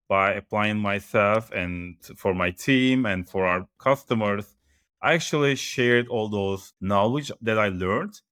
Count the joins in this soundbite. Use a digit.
1